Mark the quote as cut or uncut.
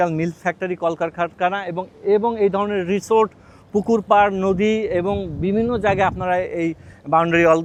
uncut